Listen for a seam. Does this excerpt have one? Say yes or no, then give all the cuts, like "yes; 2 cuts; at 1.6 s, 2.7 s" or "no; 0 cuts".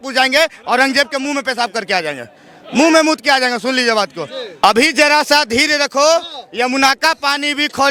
no; 0 cuts